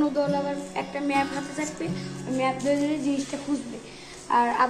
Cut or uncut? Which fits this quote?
uncut